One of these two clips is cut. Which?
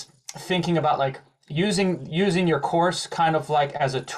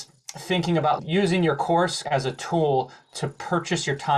second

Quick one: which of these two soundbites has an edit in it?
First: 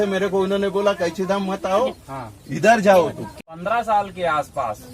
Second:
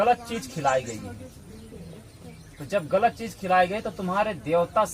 first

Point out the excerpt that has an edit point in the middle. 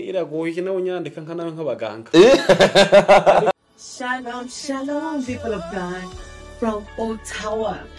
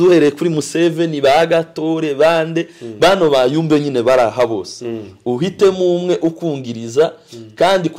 first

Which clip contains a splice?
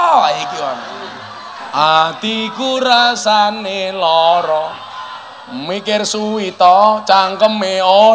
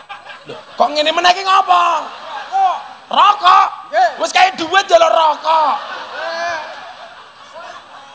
first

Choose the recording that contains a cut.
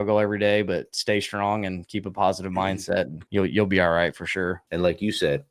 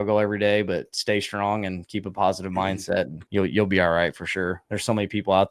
first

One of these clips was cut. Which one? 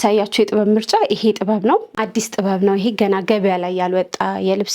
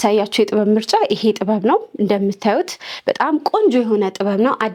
first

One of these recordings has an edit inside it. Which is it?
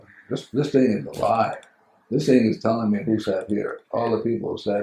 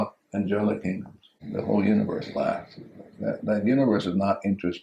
second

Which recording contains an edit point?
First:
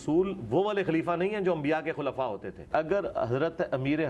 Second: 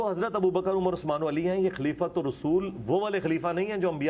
first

